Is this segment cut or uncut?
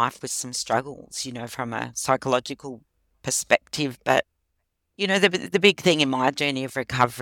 uncut